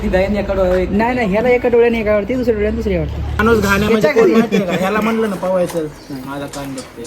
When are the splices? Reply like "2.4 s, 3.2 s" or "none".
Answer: 3.3 s